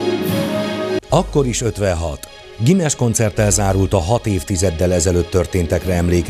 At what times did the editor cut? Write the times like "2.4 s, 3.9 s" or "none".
1.0 s

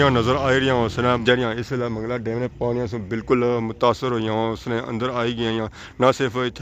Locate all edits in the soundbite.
1.2 s

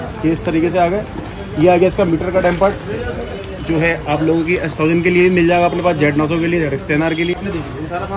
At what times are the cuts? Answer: none

